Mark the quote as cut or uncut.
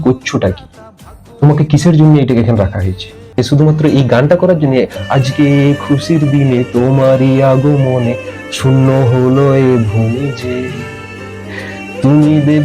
cut